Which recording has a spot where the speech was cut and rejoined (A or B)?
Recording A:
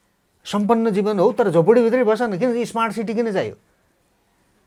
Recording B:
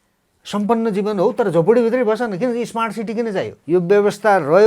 B